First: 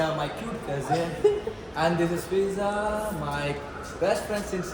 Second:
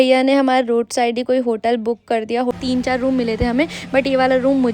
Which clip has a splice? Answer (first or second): second